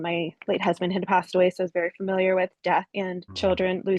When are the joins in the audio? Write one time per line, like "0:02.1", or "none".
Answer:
0:03.0